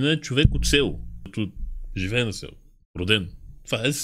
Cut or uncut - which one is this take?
cut